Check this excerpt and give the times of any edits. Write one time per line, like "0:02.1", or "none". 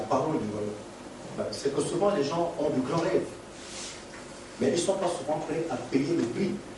0:01.4